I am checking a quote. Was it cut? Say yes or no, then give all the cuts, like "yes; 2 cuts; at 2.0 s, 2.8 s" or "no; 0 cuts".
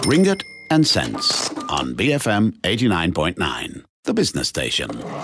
no; 0 cuts